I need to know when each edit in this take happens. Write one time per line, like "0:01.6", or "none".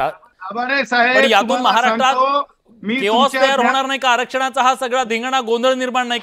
0:03.2